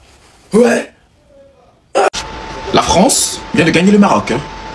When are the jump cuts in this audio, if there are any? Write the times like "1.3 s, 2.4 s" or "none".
2.1 s